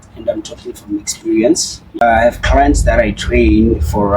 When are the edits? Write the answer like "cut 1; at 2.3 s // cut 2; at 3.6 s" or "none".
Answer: cut 1; at 2.0 s

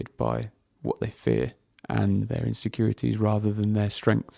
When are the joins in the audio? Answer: cut 1; at 2.3 s

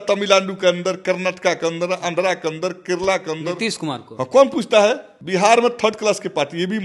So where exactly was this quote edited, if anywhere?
cut 1; at 5.1 s

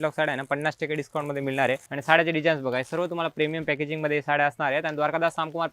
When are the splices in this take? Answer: cut 1; at 1.9 s

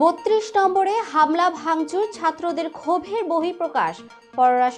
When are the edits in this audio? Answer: none

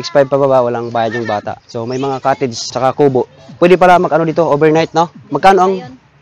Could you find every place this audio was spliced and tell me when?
cut 1; at 2.6 s

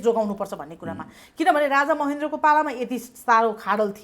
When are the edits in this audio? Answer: none

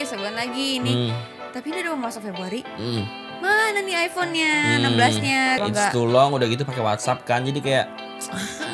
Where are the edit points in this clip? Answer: cut 1; at 5.6 s

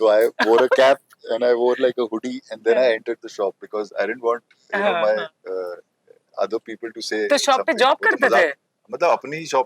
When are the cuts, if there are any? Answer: none

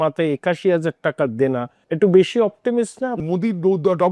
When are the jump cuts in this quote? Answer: cut 1; at 1.8 s // cut 2; at 3.2 s

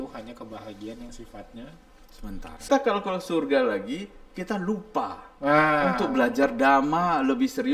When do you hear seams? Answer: cut 1; at 2.7 s

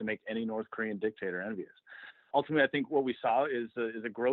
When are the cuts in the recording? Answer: cut 1; at 2.3 s

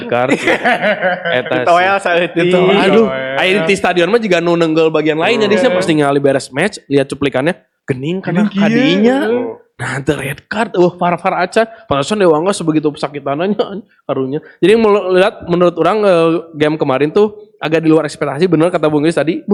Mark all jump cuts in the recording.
none

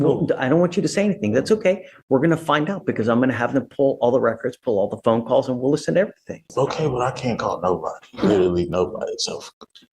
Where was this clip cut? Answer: cut 1; at 6.5 s

